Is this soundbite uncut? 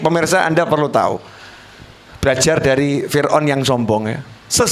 yes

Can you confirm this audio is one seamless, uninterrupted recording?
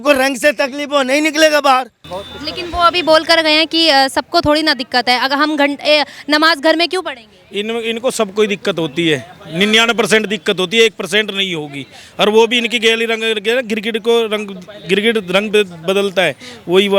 no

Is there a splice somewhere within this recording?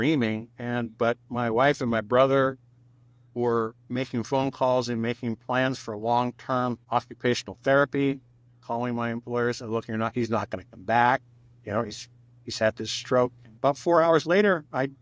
no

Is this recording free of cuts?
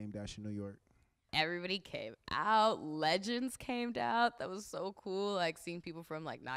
no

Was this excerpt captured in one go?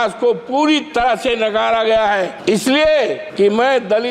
no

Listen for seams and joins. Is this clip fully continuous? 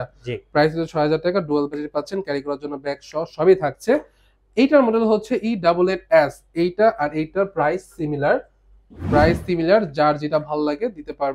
yes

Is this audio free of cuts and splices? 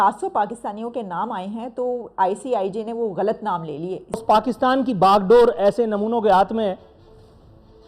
no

